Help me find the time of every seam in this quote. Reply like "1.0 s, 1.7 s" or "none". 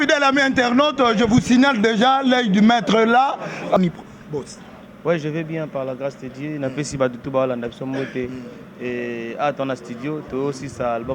3.8 s